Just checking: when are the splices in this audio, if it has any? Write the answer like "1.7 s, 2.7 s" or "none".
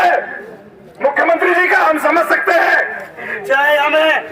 3.3 s